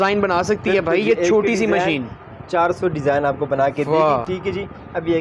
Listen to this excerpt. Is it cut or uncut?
uncut